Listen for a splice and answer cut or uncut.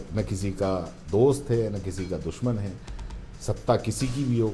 uncut